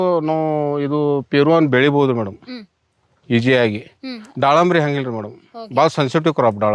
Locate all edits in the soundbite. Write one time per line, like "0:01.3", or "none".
none